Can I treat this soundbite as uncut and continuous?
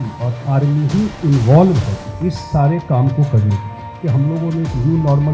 no; 2 cuts; at 2.0 s, 4.0 s

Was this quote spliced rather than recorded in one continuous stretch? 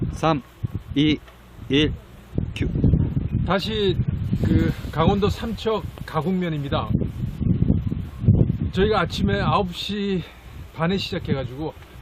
no; 0 cuts

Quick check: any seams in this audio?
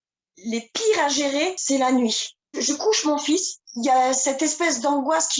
yes; 2 cuts; at 1.6 s, 3.6 s

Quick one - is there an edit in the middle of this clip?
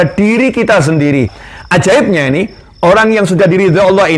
yes; 1 cut; at 1.4 s

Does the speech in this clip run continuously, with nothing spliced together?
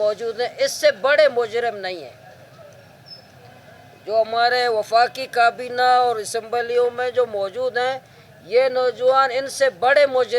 yes; 0 cuts

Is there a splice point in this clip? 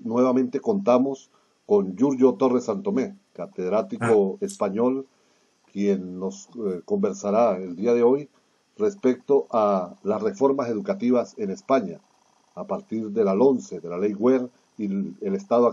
yes; 1 cut; at 2.1 s

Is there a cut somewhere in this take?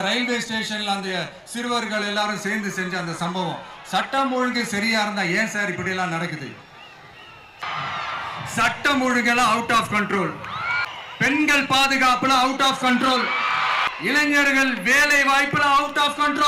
yes; 3 cuts; at 7.6 s, 10.8 s, 13.9 s

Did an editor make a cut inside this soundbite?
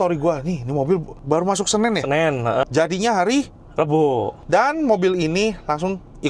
yes; 2 cuts; at 2.6 s, 4.4 s

